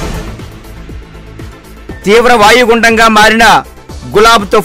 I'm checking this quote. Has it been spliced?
no; 0 cuts

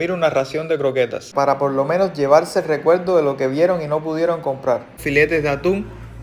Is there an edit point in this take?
yes; 2 cuts; at 1.2 s, 5.0 s

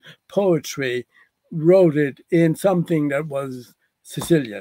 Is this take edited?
no; 0 cuts

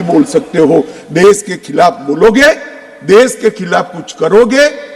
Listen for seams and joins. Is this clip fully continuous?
yes; 0 cuts

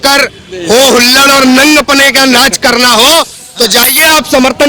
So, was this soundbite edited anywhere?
no; 0 cuts

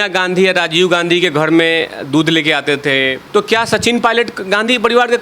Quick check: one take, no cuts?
no; 1 cut; at 3.2 s

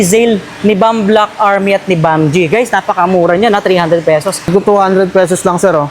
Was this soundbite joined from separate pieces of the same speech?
yes; 1 cut; at 4.4 s

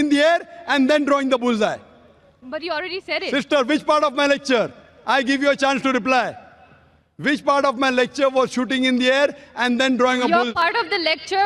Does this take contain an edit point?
no; 0 cuts

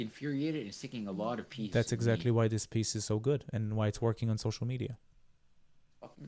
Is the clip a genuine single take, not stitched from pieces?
yes; 0 cuts

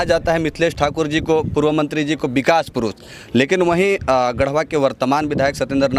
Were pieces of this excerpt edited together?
no; 0 cuts

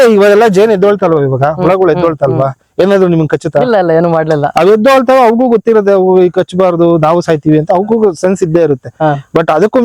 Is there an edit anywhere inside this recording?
no; 0 cuts

